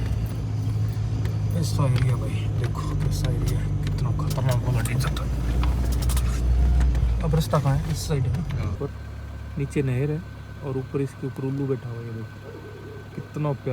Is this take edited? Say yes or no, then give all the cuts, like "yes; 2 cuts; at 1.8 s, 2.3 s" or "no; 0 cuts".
yes; 1 cut; at 8.7 s